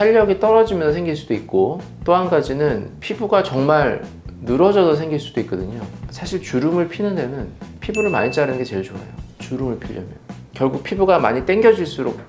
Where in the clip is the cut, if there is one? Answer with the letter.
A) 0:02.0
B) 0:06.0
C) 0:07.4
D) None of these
B